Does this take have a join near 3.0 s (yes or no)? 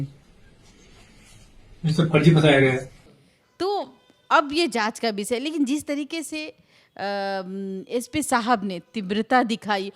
no